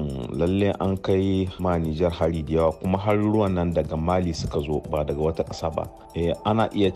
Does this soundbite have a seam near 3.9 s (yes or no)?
no